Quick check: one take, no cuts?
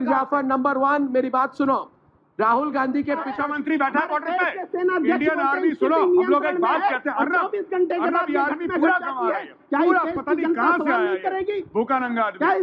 no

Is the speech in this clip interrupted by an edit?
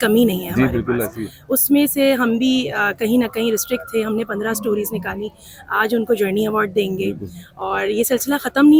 no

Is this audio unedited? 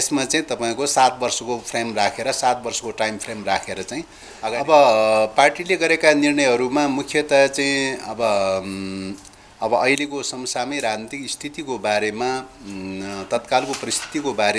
no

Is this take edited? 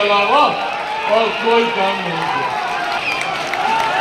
yes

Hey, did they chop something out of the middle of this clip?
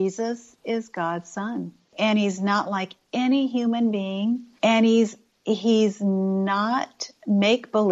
no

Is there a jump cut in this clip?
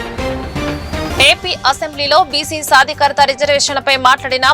yes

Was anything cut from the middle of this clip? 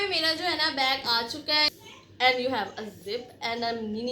yes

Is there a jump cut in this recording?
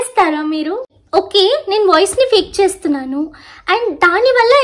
yes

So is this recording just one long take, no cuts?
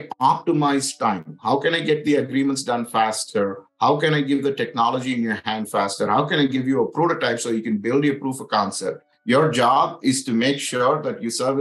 no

